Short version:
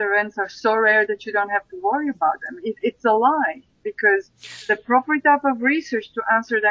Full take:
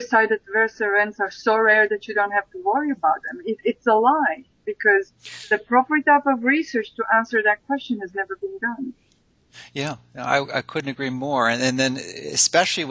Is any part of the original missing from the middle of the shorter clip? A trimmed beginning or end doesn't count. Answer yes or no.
no